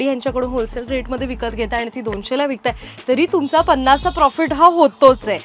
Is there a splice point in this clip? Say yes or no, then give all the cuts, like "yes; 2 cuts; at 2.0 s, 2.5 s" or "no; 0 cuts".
no; 0 cuts